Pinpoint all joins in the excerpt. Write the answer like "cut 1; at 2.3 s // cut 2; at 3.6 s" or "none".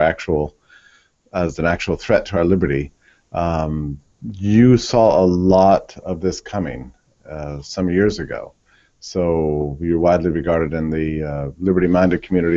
cut 1; at 11.1 s